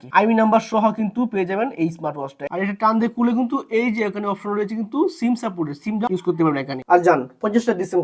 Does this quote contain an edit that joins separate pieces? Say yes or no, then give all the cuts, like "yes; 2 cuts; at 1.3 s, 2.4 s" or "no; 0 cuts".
yes; 2 cuts; at 2.4 s, 6.8 s